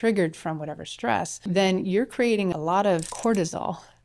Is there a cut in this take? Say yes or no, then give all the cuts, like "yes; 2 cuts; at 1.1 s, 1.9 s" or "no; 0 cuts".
yes; 2 cuts; at 1.4 s, 2.5 s